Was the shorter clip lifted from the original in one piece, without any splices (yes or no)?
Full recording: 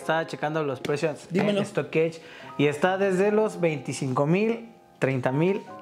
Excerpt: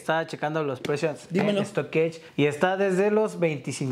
no